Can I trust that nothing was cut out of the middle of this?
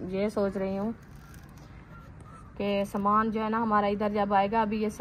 yes; 0 cuts

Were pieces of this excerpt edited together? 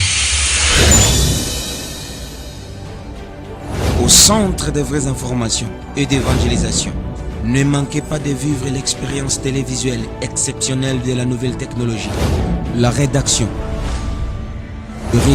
no; 0 cuts

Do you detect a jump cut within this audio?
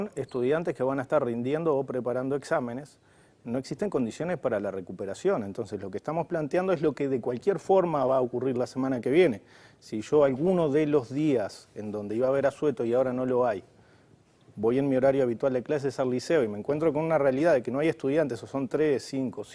yes; 1 cut; at 15.7 s

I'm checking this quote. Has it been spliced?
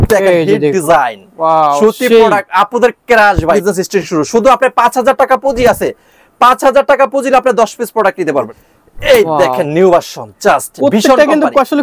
yes; 2 cuts; at 3.6 s, 8.5 s

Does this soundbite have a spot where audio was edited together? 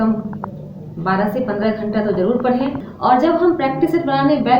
yes; 1 cut; at 2.9 s

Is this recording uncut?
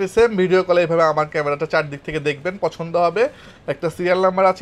yes; 0 cuts

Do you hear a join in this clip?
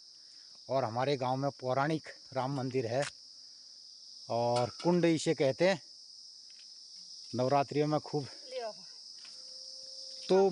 no; 0 cuts

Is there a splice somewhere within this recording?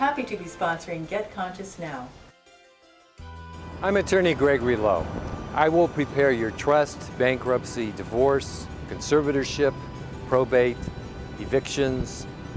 no; 0 cuts

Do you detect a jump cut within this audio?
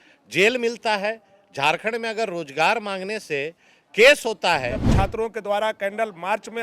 yes; 1 cut; at 4.9 s

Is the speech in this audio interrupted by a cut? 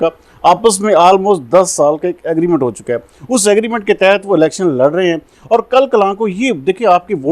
no; 0 cuts

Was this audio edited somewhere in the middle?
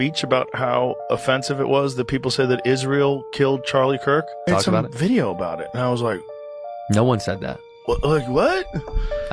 no; 0 cuts

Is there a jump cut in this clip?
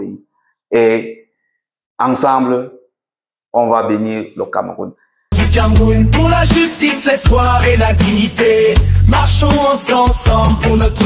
yes; 1 cut; at 5.2 s

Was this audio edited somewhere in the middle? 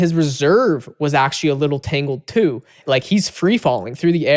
yes; 1 cut; at 2.8 s

